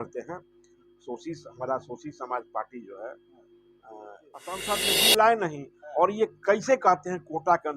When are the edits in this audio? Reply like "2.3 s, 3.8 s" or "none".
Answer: 4.6 s